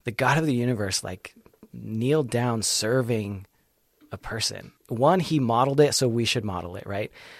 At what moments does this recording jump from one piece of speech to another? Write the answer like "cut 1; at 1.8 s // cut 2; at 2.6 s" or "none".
cut 1; at 4.7 s